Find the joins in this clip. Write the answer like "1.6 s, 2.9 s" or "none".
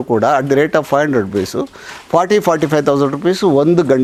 none